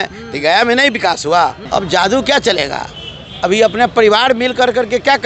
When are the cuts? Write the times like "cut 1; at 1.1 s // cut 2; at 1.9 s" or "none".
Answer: cut 1; at 1.6 s